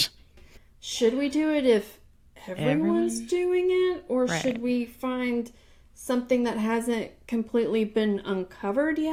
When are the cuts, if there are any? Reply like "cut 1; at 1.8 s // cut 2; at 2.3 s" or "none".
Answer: none